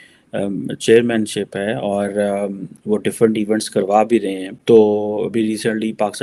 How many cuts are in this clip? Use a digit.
0